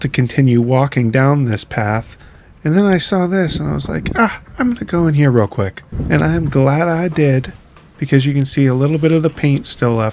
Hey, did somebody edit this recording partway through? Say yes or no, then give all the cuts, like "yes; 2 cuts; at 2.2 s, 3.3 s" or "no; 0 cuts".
yes; 1 cut; at 6.1 s